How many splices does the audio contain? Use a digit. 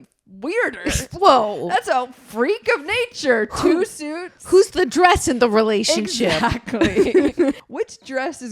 1